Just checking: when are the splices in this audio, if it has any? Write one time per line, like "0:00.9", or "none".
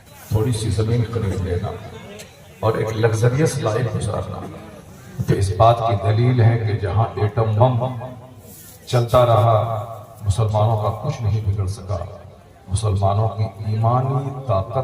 0:05.3